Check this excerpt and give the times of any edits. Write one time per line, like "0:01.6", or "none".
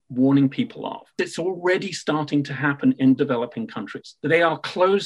0:01.2
0:04.1